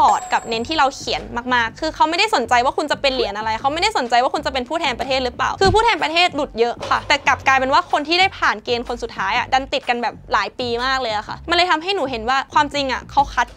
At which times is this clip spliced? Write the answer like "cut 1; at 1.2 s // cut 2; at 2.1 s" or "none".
none